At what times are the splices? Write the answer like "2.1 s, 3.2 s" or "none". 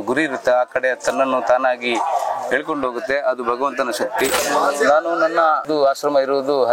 4.4 s, 5.6 s